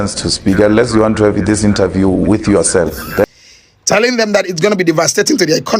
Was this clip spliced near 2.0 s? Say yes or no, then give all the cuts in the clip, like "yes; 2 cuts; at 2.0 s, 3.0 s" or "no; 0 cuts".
no; 1 cut; at 3.3 s